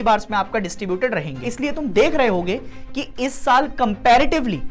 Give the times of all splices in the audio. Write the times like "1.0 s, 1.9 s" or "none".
1.4 s